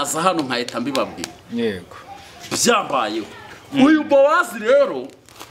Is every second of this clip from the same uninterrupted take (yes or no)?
yes